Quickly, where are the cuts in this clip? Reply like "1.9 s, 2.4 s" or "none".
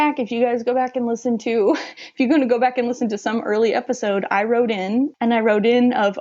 5.1 s